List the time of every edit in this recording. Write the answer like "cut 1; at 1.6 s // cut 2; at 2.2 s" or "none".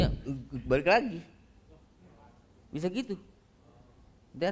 none